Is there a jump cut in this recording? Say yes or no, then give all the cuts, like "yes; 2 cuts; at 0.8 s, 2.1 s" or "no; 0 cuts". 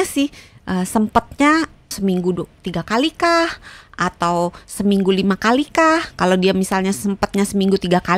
yes; 1 cut; at 1.8 s